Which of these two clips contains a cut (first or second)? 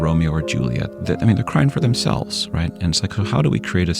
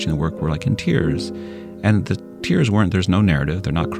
first